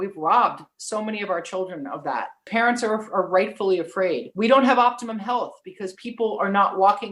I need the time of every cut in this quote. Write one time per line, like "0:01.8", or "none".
0:02.5
0:04.3